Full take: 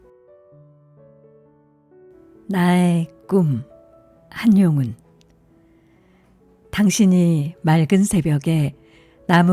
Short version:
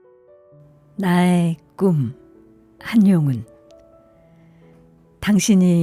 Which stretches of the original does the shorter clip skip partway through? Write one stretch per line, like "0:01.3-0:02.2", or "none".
0:00.9-0:02.4